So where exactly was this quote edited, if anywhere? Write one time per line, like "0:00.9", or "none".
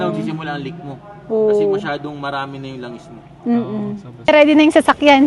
0:04.3

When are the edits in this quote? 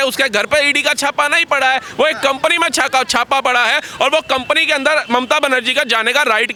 none

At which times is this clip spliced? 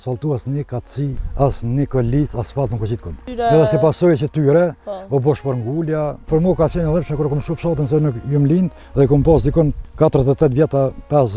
0:01.2
0:03.2
0:06.2
0:08.8
0:09.8

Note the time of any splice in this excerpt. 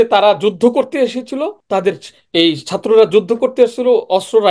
0:01.6

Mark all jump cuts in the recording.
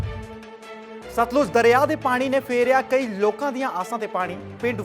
0:01.1

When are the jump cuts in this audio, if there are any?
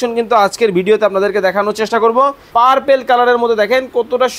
0:02.4

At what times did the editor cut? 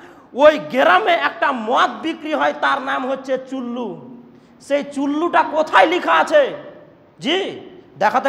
none

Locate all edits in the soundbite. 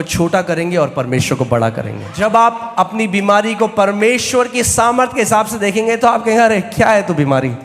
0:02.1

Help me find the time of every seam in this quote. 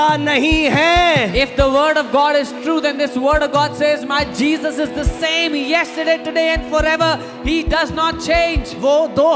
none

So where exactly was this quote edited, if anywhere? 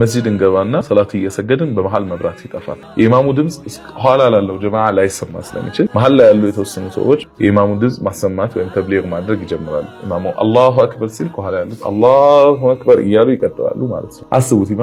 0:00.9
0:02.8
0:07.3

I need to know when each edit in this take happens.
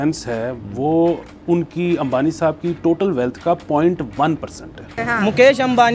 0:04.8

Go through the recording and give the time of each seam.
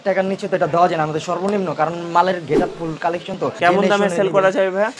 0:03.4

